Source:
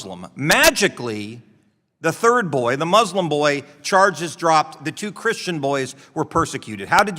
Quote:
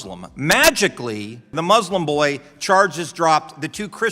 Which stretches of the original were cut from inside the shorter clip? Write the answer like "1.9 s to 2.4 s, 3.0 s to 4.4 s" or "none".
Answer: 1.6 s to 2.8 s

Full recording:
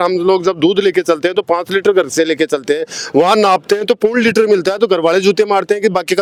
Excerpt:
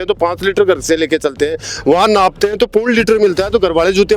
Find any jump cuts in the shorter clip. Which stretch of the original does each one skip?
none

